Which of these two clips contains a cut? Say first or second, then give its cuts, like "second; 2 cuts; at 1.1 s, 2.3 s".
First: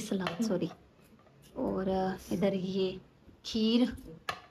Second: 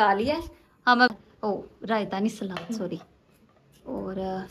second; 1 cut; at 1.1 s